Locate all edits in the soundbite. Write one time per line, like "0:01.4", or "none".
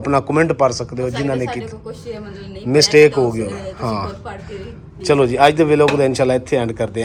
none